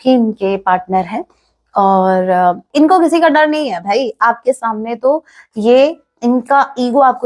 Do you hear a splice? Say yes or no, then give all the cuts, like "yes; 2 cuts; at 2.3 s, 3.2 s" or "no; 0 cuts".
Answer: yes; 1 cut; at 2.7 s